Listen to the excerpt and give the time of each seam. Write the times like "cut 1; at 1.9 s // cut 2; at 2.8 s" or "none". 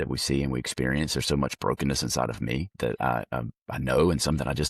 cut 1; at 2.7 s